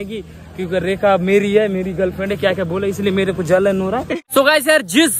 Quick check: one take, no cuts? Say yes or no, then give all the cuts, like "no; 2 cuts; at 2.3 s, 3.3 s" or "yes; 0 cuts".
no; 1 cut; at 4.2 s